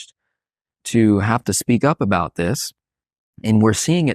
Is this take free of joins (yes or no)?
yes